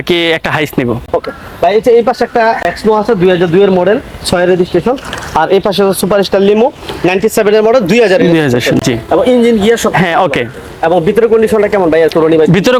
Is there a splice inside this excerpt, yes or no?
no